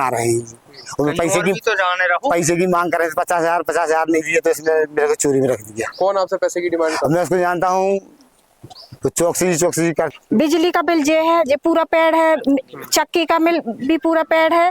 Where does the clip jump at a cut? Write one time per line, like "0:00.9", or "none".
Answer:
0:10.1